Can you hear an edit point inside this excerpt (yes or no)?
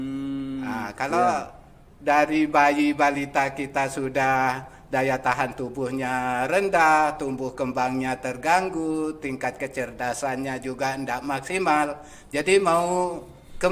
no